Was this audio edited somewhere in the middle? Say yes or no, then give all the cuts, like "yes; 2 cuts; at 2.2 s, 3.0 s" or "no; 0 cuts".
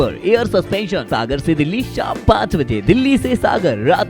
yes; 1 cut; at 1.1 s